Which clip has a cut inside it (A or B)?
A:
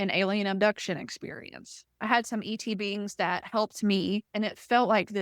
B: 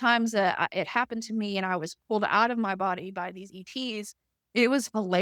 A